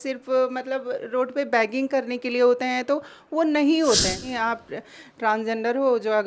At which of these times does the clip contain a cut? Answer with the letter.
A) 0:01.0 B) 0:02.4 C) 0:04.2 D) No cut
C